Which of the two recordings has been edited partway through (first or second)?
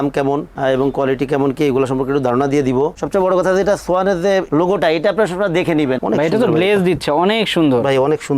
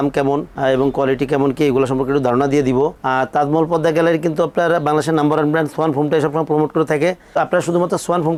first